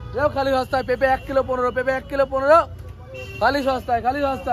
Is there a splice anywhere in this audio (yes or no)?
no